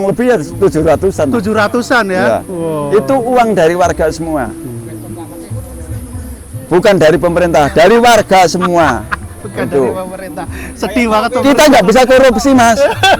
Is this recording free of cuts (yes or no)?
yes